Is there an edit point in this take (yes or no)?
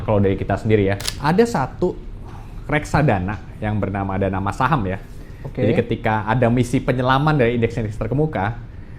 yes